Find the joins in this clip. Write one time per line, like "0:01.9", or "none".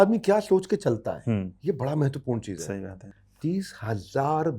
0:03.0